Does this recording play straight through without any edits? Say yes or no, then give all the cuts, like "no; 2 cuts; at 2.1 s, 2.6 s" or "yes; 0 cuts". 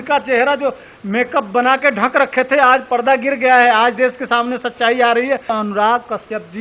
no; 1 cut; at 5.5 s